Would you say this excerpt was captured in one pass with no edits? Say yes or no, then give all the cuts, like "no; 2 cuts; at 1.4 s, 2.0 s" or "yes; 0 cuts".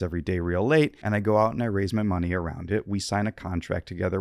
no; 1 cut; at 1.0 s